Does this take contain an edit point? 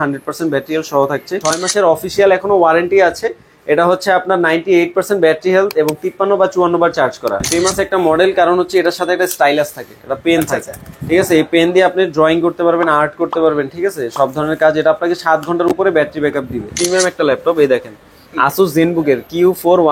yes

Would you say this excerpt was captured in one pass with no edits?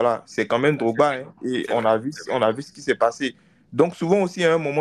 yes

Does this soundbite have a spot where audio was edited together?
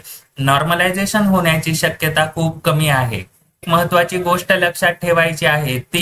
yes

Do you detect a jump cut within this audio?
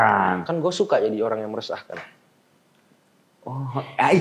no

